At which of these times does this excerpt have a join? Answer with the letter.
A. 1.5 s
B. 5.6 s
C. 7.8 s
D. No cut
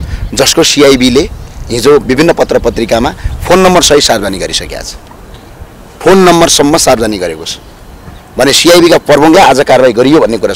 D